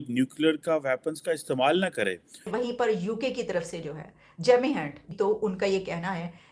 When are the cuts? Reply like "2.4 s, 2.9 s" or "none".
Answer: 2.5 s, 5.0 s